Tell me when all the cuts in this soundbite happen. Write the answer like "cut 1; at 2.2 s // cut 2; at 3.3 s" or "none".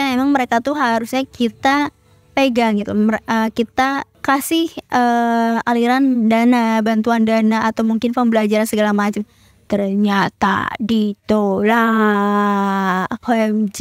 none